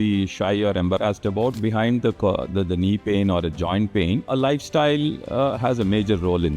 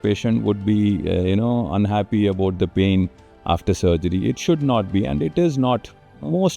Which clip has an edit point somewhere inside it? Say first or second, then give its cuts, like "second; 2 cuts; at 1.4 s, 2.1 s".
first; 2 cuts; at 1.6 s, 4.3 s